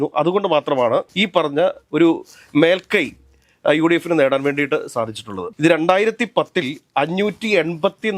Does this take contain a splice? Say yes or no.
no